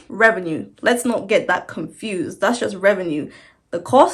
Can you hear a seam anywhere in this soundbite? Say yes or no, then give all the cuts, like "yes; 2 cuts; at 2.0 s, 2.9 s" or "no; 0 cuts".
no; 0 cuts